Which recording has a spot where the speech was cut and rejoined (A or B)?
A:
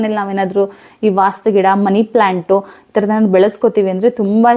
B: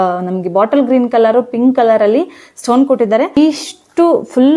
B